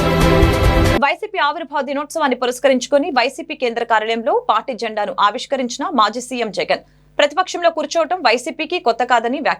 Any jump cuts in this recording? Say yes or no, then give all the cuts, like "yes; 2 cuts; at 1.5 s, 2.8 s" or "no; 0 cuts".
yes; 1 cut; at 0.9 s